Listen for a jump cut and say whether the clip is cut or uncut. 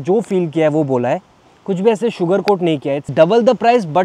cut